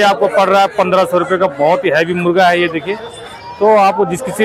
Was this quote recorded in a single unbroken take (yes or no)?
yes